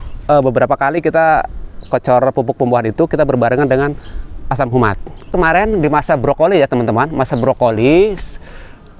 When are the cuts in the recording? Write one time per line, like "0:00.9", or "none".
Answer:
0:05.3

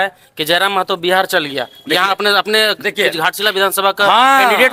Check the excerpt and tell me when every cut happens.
none

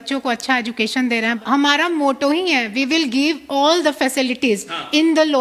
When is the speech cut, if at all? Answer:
0:01.4

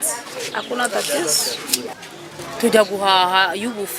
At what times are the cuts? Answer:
none

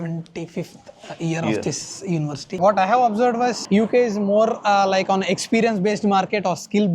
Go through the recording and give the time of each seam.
0:02.6

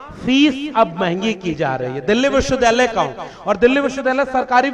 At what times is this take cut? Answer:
none

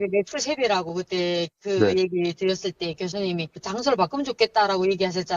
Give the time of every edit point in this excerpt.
0:03.6

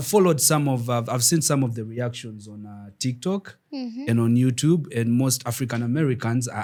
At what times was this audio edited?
none

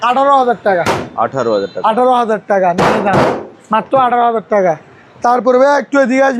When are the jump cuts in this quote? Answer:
none

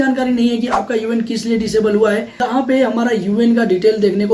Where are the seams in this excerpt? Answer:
0:02.4

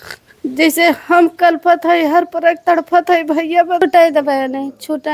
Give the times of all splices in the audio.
0:03.8

